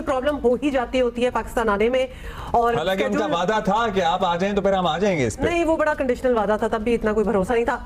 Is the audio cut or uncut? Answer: uncut